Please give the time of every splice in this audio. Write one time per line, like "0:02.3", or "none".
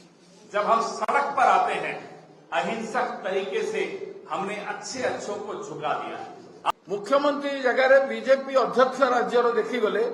0:06.7